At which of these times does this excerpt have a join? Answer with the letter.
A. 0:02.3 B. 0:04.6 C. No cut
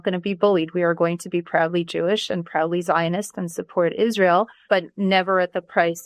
B